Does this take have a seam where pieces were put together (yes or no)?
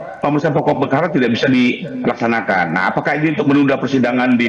no